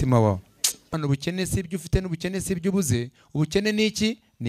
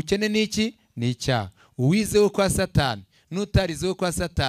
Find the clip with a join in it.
first; 1 cut; at 0.9 s

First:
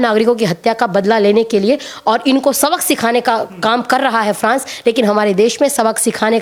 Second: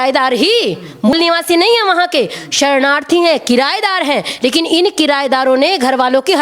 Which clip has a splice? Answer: second; 1 cut; at 1.1 s

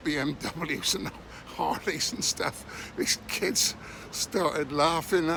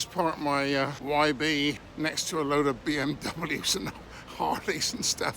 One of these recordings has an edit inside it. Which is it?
second; 2 cuts; at 1.0 s, 1.9 s

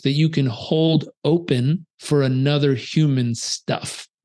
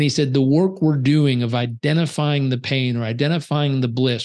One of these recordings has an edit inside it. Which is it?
first; 1 cut; at 1.9 s

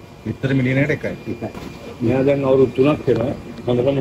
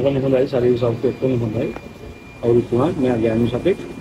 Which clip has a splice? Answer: first; 1 cut; at 2.1 s

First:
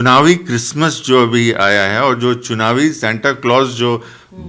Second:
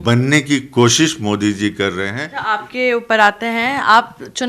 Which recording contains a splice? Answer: second; 1 cut; at 2.2 s

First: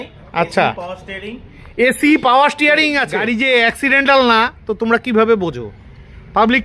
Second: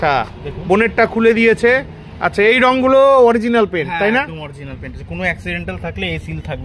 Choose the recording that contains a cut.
first; 1 cut; at 3.1 s

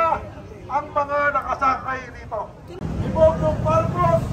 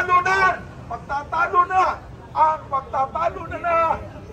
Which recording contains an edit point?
first; 1 cut; at 2.8 s

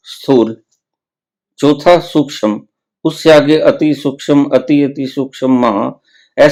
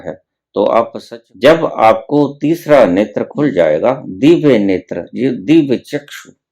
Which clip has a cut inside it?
second; 1 cut; at 1.0 s

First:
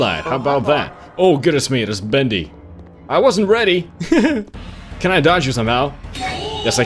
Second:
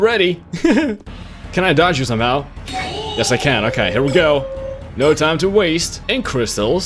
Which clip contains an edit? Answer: second; 1 cut; at 5.9 s

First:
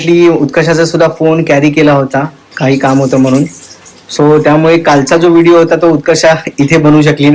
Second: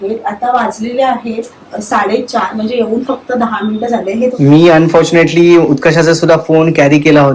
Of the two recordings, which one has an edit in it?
second; 1 cut; at 4.3 s

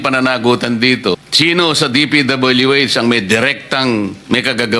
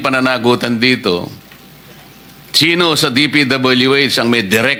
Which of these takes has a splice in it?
first; 1 cut; at 1.2 s

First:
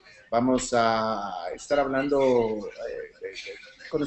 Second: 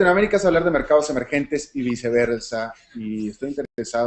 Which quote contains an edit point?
second; 1 cut; at 1.1 s

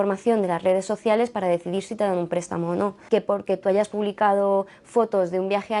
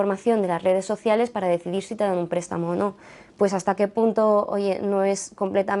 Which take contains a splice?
first; 1 cut; at 3.0 s

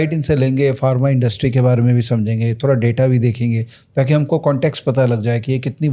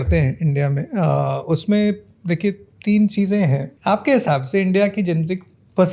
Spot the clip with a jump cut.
second; 1 cut; at 3.7 s

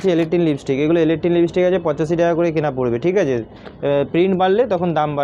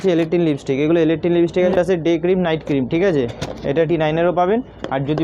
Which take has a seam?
second; 2 cuts; at 1.7 s, 3.9 s

